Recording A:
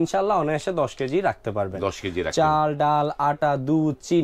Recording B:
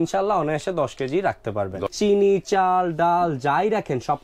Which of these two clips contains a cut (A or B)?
B